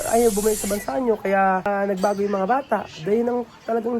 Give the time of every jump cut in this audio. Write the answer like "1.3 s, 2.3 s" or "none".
1.7 s